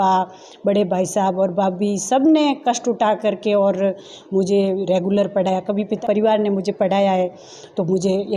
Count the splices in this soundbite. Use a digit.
1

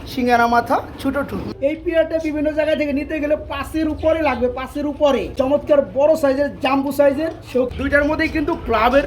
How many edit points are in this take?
3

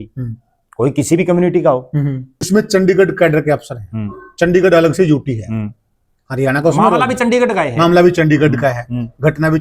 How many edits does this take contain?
1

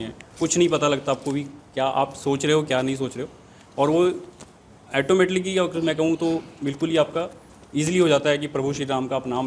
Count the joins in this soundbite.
0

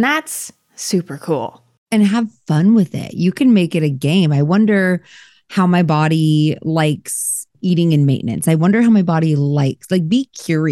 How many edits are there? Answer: 1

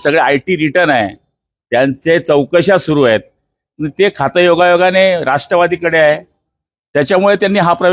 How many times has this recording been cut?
0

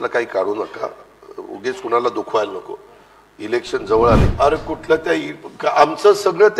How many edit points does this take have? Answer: 1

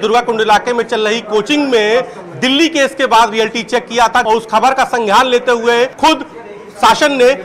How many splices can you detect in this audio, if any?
2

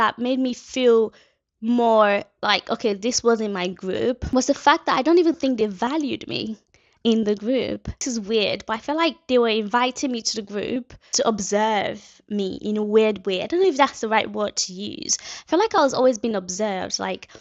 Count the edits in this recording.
2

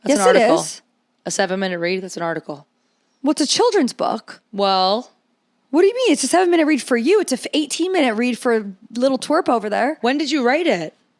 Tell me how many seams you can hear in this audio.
1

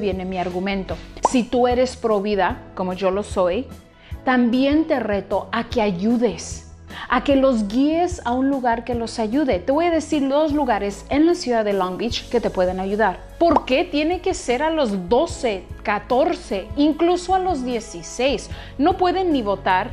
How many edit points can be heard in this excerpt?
2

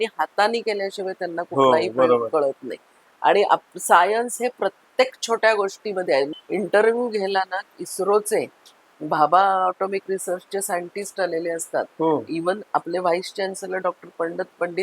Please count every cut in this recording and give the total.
1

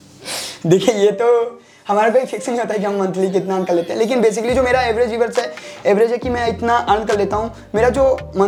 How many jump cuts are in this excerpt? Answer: 0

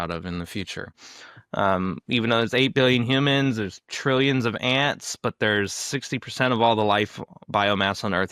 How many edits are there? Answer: 1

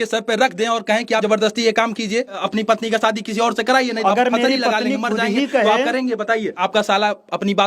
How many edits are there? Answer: 4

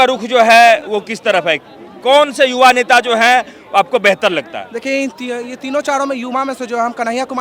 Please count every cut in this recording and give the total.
0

